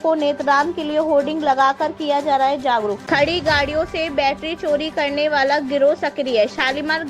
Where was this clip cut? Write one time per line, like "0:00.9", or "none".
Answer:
0:03.0